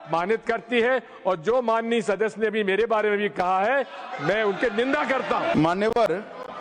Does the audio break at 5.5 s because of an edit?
yes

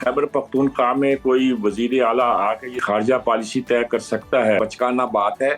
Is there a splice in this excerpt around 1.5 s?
no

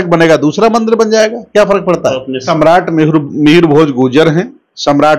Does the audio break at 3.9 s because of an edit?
no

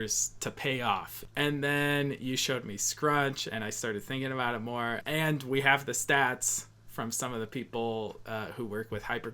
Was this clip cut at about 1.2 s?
yes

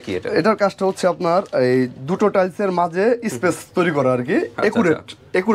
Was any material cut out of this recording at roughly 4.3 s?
no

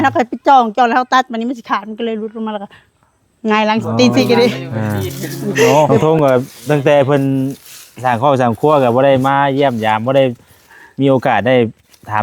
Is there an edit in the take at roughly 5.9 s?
yes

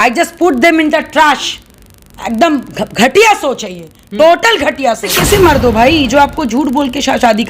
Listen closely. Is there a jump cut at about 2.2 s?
no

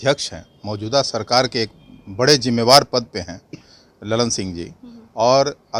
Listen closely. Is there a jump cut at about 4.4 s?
no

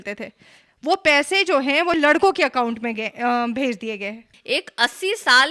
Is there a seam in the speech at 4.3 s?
yes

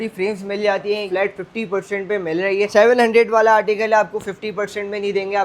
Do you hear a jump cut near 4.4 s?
no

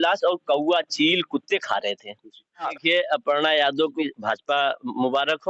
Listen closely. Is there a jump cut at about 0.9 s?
no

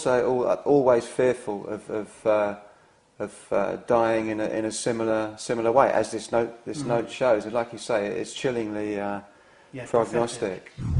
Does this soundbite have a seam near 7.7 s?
yes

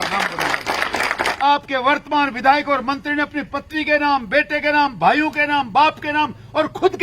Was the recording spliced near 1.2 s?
yes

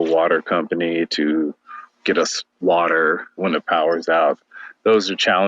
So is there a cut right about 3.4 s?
yes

